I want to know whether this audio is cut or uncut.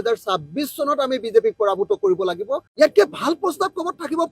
cut